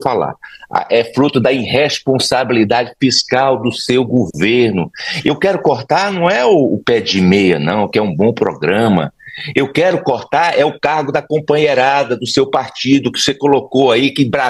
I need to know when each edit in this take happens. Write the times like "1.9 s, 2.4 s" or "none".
none